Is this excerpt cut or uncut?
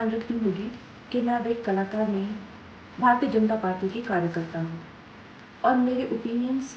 uncut